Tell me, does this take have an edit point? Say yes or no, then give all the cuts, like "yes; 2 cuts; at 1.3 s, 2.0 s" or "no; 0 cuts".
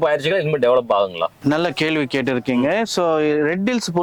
no; 0 cuts